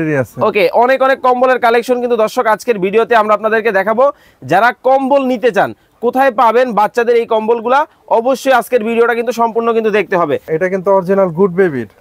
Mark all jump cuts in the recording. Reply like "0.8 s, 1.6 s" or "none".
10.4 s